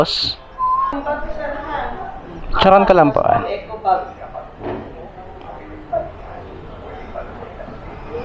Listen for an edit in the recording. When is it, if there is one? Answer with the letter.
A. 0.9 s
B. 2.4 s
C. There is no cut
A